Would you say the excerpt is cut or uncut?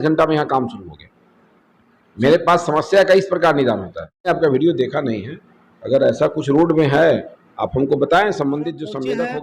cut